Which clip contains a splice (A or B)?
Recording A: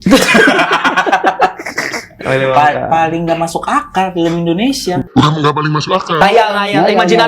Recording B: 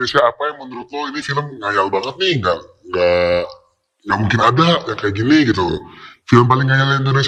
A